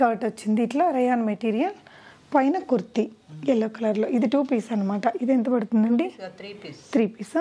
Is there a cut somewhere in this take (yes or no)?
no